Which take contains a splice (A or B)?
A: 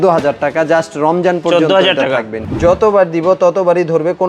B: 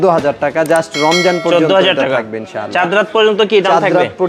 A